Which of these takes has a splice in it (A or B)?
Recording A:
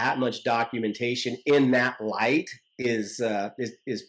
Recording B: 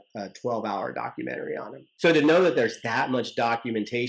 B